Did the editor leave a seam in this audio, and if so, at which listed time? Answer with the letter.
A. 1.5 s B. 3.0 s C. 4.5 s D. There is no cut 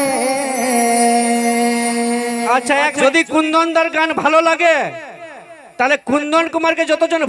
B